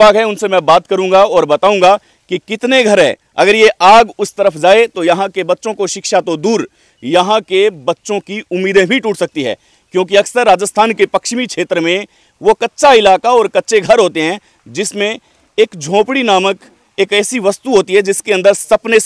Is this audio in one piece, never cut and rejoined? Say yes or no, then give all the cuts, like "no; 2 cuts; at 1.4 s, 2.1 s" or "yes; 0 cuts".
yes; 0 cuts